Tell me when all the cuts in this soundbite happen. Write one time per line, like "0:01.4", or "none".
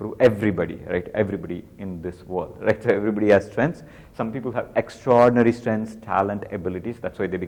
none